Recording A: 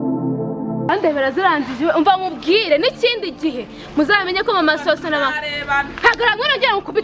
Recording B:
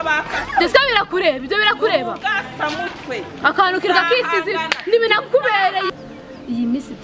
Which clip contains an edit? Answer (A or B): B